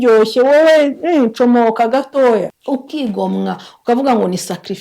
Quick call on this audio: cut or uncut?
cut